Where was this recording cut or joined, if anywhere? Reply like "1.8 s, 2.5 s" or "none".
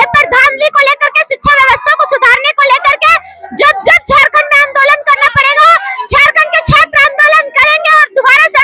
none